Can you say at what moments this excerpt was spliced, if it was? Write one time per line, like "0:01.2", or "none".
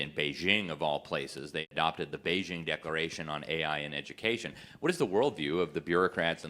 0:01.7